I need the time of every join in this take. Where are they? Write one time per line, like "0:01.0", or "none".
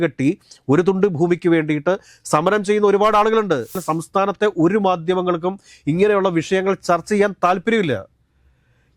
0:03.8